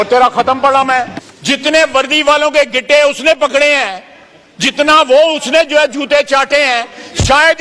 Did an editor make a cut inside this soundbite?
yes; 1 cut; at 1.2 s

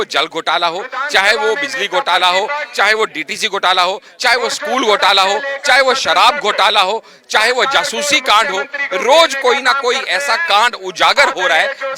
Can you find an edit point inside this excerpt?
no; 0 cuts

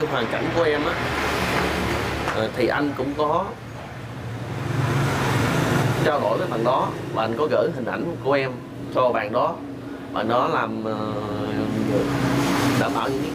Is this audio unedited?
yes; 0 cuts

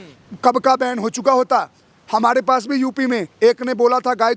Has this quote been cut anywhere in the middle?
no; 0 cuts

